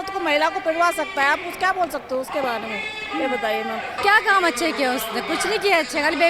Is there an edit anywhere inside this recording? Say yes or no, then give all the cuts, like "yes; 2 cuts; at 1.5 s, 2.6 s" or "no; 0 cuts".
yes; 1 cut; at 3.9 s